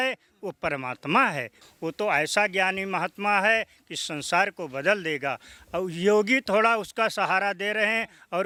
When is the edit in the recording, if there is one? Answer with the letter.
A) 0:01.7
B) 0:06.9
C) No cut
C